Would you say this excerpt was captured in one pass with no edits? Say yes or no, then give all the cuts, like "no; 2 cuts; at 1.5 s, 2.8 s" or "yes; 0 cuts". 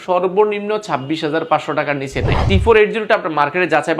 yes; 0 cuts